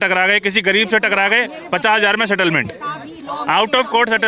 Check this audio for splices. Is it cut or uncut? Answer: uncut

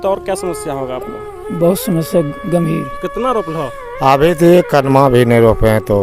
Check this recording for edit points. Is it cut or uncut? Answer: cut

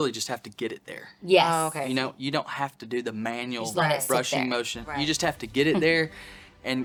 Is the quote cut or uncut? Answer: uncut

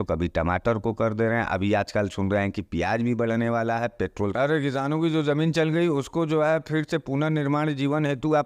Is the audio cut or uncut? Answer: cut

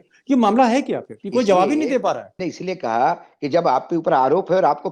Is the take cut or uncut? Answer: cut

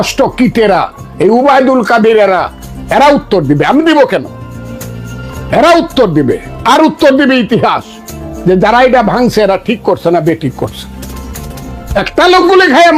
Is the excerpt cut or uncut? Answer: uncut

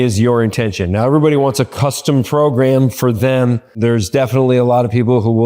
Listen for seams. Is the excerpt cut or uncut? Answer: cut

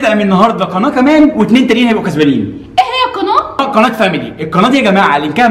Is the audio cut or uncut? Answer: cut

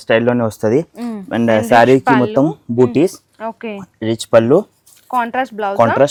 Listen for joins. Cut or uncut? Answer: uncut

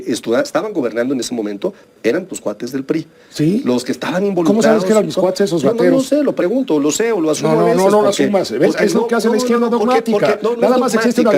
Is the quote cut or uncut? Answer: uncut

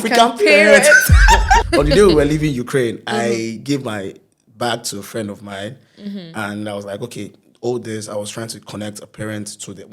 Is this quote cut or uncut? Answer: cut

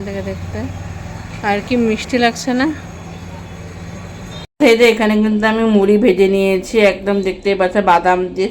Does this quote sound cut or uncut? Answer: cut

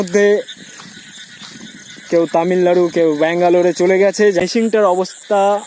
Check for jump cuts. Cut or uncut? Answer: cut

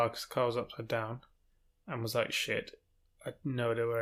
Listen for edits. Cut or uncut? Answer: uncut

